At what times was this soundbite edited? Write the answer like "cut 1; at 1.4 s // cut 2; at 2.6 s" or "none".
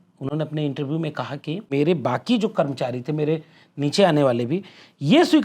cut 1; at 1.7 s

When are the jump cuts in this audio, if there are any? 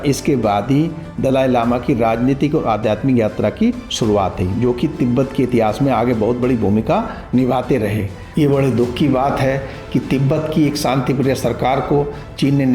cut 1; at 8.2 s

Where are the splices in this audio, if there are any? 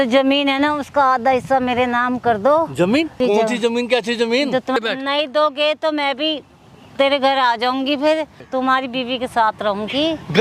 cut 1; at 3.2 s // cut 2; at 4.8 s // cut 3; at 8.4 s

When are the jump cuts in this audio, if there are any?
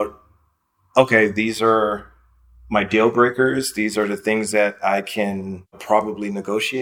cut 1; at 5.8 s

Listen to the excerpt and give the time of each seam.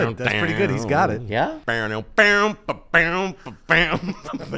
cut 1; at 1.6 s

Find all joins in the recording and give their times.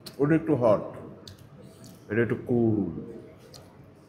none

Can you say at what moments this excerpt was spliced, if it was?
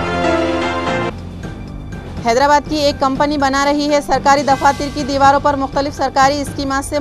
cut 1; at 1.0 s

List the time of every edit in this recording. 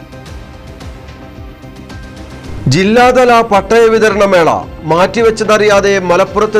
cut 1; at 0.8 s // cut 2; at 2.6 s

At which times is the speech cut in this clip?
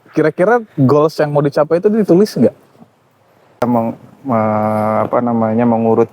cut 1; at 3.6 s

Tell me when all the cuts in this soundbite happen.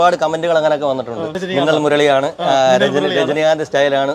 cut 1; at 1.3 s

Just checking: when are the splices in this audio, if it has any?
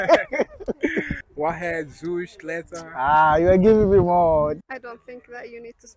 cut 1; at 1.2 s // cut 2; at 4.6 s

